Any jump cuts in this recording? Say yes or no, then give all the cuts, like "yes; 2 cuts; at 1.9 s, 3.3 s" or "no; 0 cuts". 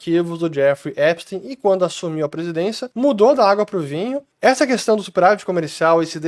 yes; 2 cuts; at 2.8 s, 4.2 s